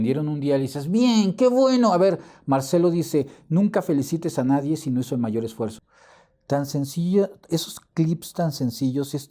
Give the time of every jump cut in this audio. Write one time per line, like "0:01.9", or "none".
0:05.9